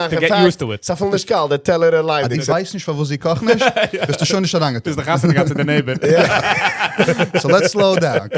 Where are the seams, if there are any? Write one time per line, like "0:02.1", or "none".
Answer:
0:02.4